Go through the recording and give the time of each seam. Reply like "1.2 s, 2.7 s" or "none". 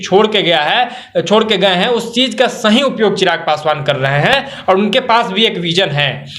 none